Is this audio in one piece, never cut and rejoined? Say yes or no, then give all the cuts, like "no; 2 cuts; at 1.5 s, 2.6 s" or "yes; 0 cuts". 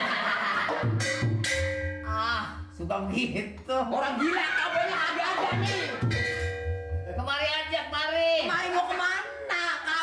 yes; 0 cuts